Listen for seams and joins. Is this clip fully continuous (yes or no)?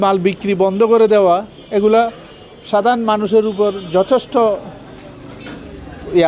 yes